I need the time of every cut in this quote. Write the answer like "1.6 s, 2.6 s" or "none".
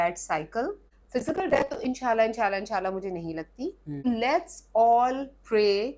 0.9 s, 4.0 s